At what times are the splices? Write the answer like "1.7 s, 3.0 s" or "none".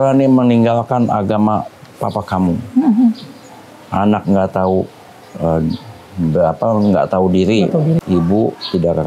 8.0 s